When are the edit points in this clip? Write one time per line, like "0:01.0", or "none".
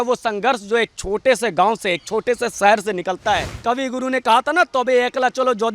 0:03.5